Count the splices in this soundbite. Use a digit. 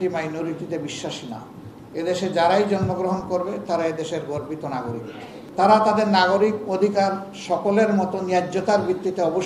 2